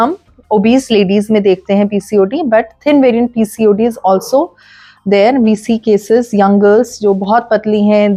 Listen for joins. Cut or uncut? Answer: uncut